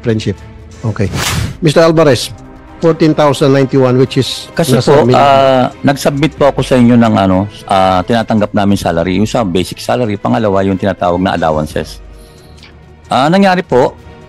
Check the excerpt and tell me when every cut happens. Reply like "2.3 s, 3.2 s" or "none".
4.5 s